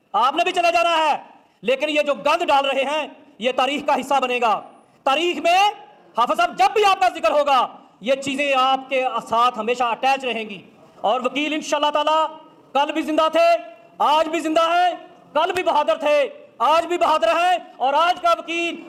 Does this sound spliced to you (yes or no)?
no